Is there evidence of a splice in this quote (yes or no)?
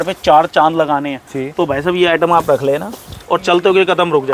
no